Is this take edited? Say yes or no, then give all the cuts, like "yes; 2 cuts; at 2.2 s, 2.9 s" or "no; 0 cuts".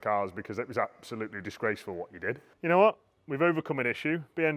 yes; 1 cut; at 2.5 s